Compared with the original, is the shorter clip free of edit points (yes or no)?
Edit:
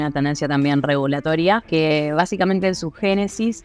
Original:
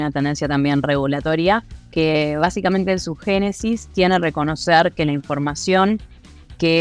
no